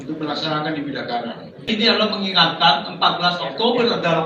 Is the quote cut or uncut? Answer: cut